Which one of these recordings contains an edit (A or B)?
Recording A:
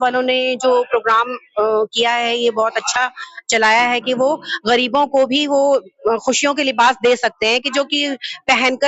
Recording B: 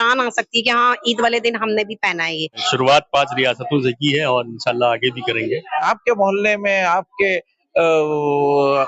B